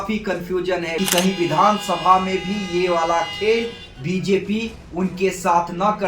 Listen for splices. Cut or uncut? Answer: cut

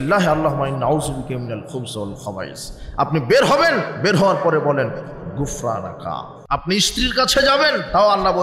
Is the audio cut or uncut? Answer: cut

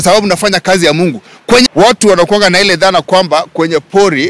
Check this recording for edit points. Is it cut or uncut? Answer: cut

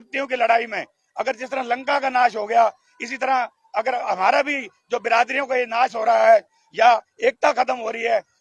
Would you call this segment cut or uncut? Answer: uncut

